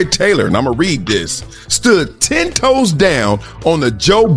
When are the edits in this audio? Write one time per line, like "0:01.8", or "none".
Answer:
none